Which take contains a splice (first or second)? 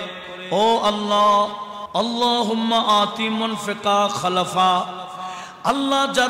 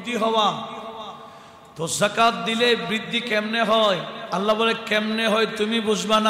first